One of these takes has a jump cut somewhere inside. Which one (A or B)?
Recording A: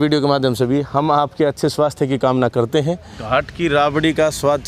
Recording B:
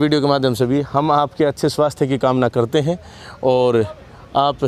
A